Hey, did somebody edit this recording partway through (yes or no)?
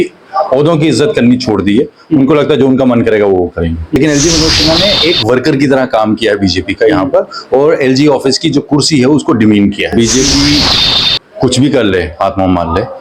yes